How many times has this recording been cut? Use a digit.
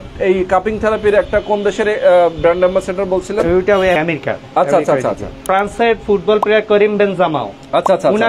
2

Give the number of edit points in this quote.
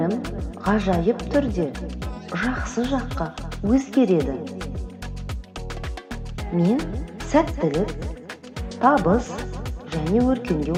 0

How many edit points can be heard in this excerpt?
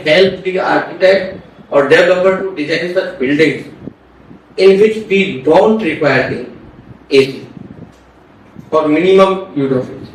0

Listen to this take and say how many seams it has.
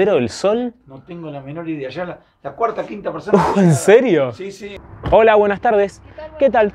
1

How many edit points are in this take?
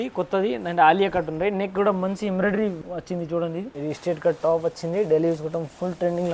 2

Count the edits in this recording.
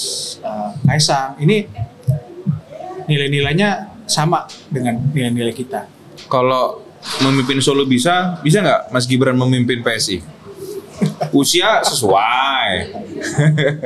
0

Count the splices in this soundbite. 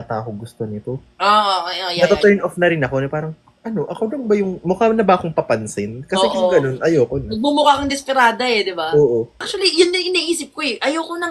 1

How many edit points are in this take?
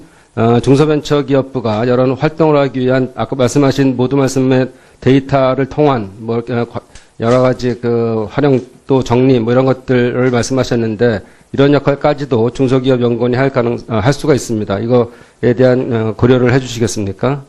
1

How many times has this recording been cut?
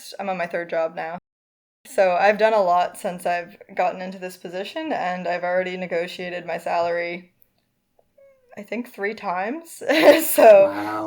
1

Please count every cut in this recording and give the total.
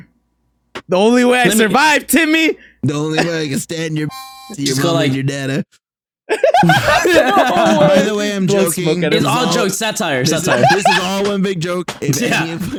0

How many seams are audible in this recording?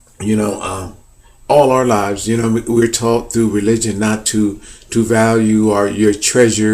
1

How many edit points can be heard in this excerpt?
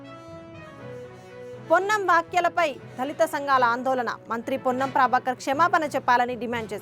1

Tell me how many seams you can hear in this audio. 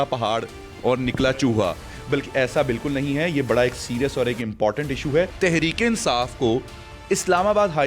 1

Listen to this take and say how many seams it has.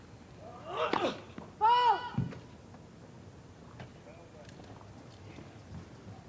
0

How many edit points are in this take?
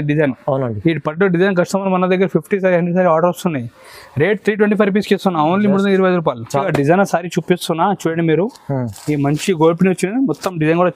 1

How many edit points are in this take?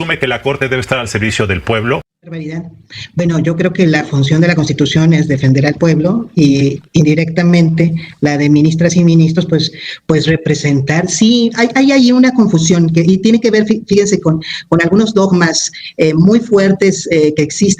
1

